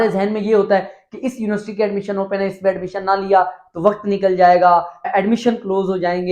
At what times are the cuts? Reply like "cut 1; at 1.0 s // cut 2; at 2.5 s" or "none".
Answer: cut 1; at 5.1 s